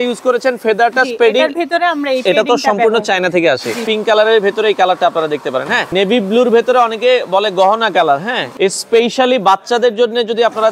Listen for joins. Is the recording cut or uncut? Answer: cut